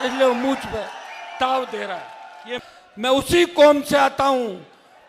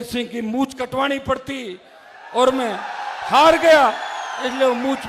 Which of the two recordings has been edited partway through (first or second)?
first